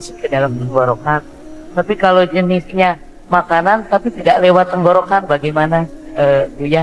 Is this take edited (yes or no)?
no